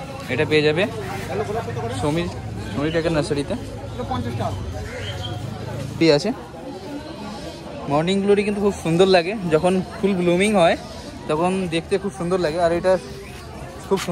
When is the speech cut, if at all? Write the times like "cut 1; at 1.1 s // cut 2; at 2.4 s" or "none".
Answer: cut 1; at 6.0 s